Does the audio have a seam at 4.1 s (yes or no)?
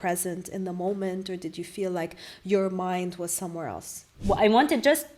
yes